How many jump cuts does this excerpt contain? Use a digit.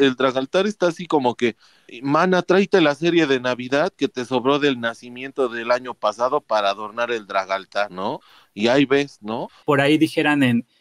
1